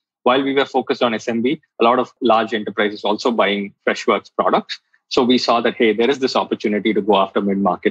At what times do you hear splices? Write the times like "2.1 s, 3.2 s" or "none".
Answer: 2.1 s, 3.7 s